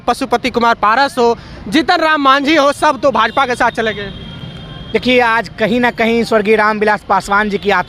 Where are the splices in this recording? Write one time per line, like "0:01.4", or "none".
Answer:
none

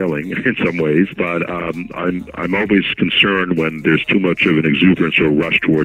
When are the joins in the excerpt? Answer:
0:01.1

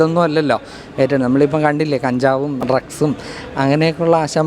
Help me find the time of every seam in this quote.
0:02.6

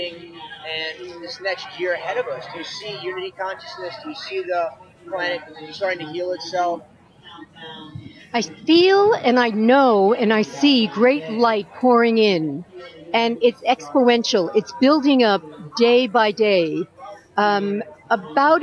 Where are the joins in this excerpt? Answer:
none

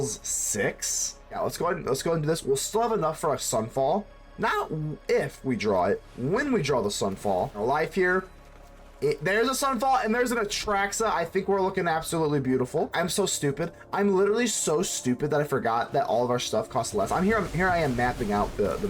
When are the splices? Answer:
0:01.4
0:07.6
0:12.9

